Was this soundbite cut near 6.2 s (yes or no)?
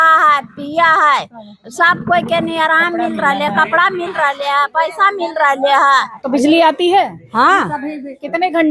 yes